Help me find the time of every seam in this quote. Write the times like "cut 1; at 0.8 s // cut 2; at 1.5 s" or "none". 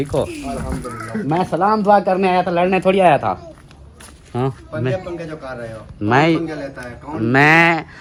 none